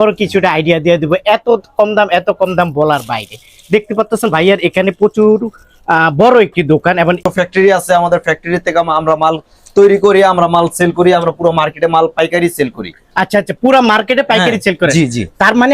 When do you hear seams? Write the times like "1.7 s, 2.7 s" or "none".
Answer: 7.2 s